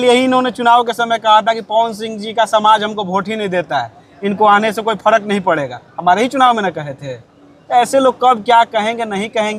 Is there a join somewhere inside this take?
no; 0 cuts

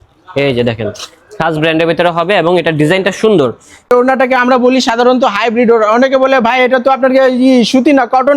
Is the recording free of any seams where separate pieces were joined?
no; 1 cut; at 3.9 s

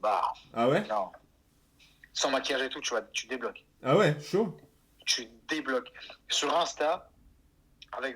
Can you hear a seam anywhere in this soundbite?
no; 0 cuts

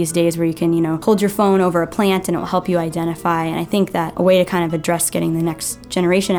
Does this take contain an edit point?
yes; 2 cuts; at 1.0 s, 4.1 s

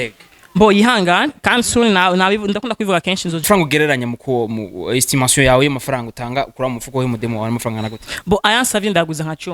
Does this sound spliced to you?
yes; 1 cut; at 3.4 s

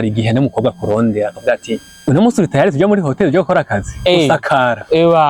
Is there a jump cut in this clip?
yes; 1 cut; at 1.9 s

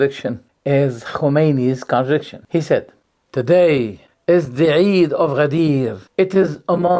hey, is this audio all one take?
no; 3 cuts; at 2.4 s, 4.0 s, 6.0 s

